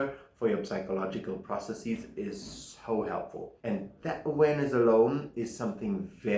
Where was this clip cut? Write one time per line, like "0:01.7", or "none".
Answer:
0:03.4